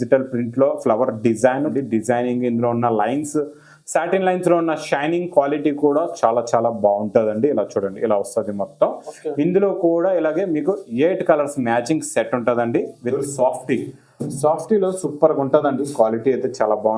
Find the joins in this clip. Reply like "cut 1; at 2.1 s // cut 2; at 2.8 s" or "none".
cut 1; at 1.7 s // cut 2; at 13.0 s